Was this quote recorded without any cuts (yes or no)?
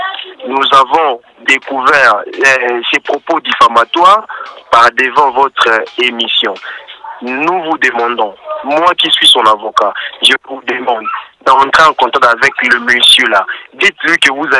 yes